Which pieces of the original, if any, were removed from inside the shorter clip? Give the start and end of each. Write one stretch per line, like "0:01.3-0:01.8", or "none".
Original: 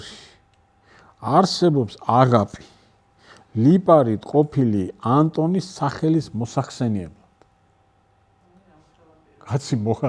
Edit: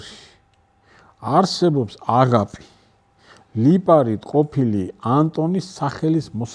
none